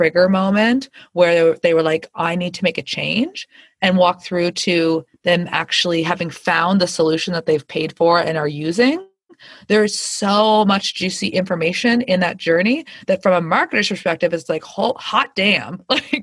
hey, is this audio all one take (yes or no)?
yes